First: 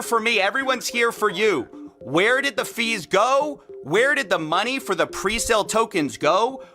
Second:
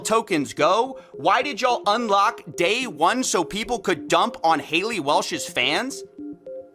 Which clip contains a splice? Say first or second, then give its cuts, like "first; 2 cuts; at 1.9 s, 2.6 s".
first; 1 cut; at 1.7 s